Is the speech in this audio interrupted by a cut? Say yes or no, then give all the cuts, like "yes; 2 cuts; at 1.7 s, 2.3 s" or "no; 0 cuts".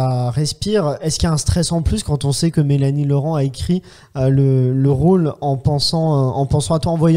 yes; 1 cut; at 1.0 s